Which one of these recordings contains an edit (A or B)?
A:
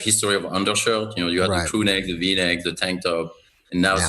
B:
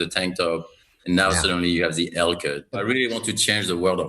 B